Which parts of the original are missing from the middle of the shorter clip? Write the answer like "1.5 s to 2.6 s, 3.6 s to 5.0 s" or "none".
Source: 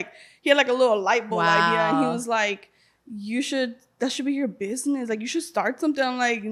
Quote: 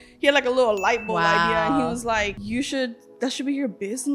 2.6 s to 3.2 s